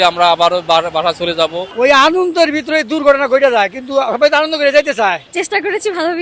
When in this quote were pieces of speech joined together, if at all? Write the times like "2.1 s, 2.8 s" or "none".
1.7 s, 5.3 s